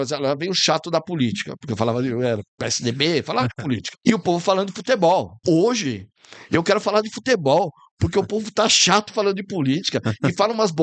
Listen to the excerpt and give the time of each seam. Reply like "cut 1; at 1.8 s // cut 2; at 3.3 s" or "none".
cut 1; at 3.9 s // cut 2; at 5.3 s